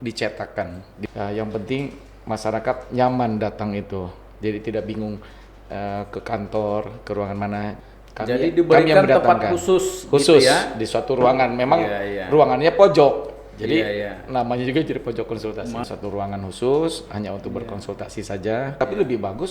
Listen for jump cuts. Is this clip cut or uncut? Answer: cut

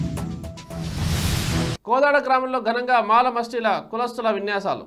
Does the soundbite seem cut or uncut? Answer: uncut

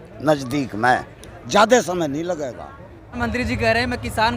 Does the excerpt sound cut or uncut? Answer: cut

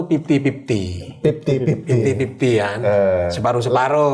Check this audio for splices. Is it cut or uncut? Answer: uncut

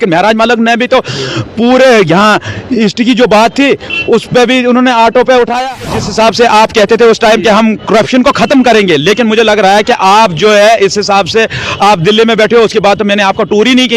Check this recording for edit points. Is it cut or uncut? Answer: cut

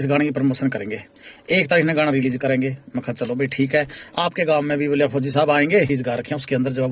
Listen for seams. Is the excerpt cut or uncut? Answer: cut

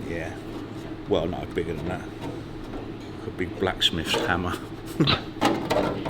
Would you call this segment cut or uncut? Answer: cut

